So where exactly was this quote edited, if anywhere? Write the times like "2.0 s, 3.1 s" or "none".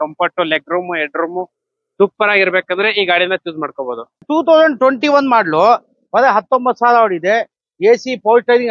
4.2 s